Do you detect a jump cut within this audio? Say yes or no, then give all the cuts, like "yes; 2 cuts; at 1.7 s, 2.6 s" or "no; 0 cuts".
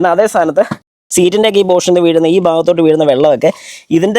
yes; 1 cut; at 1.1 s